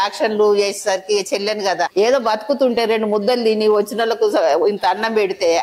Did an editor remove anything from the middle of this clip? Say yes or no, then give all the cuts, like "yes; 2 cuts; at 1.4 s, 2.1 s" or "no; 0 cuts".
yes; 1 cut; at 1.9 s